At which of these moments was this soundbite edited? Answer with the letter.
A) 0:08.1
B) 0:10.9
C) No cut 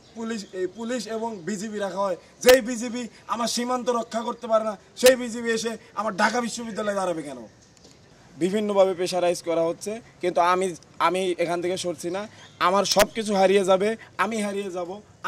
A